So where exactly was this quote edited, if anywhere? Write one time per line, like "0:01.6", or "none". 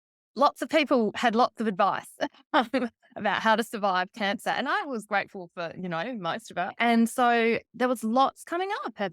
0:06.7